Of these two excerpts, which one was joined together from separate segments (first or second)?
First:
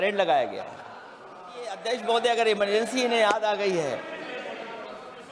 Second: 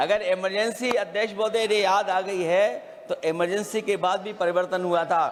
first